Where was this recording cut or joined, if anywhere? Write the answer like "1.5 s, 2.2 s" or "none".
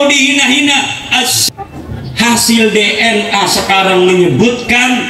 1.4 s